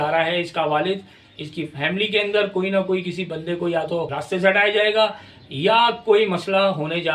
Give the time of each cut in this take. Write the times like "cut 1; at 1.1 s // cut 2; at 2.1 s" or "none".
cut 1; at 4.1 s